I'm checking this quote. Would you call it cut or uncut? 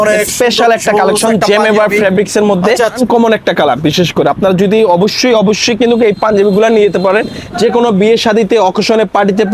cut